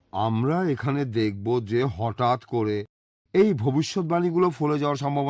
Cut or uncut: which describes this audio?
uncut